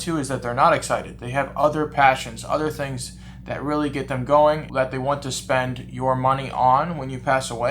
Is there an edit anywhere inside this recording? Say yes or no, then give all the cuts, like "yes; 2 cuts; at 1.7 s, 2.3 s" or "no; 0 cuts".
no; 0 cuts